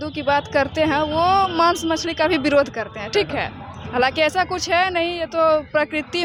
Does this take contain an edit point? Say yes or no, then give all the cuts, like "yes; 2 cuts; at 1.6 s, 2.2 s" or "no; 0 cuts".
no; 0 cuts